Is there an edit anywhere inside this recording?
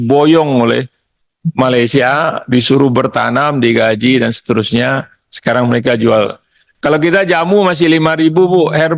no; 0 cuts

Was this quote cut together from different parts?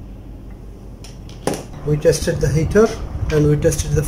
yes; 1 cut; at 1.7 s

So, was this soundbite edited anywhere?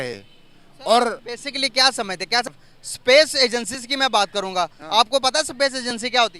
yes; 1 cut; at 2.5 s

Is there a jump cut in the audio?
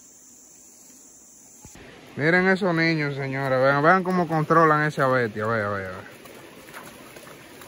yes; 1 cut; at 1.9 s

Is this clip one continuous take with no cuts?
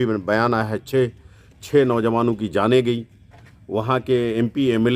yes; 0 cuts

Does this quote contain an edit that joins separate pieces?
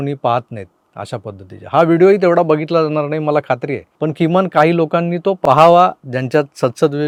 no; 0 cuts

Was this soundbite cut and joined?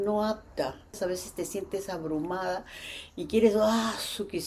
yes; 1 cut; at 1.0 s

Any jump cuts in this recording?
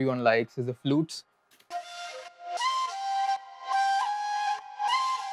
yes; 1 cut; at 1.4 s

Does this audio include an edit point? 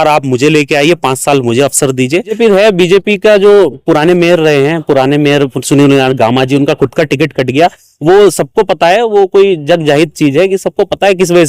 yes; 1 cut; at 2.4 s

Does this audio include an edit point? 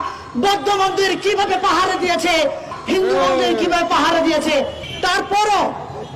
yes; 2 cuts; at 2.7 s, 4.8 s

